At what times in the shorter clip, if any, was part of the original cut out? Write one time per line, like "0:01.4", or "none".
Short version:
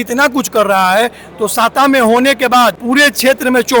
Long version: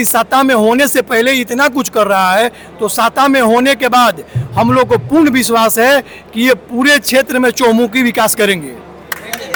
0:02.8